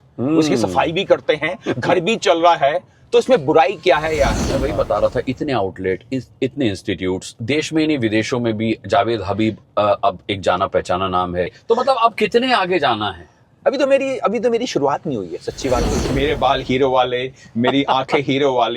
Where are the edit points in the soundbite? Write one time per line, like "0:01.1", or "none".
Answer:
0:04.5
0:11.6
0:16.0